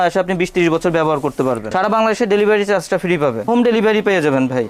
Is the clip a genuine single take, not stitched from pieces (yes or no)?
no